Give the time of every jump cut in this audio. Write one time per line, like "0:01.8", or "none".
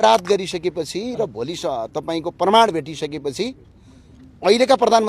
none